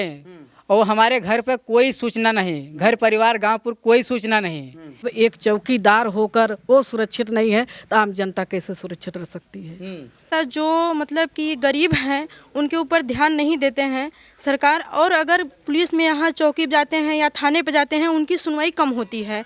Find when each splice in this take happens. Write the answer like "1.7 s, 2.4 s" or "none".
5.1 s, 10.3 s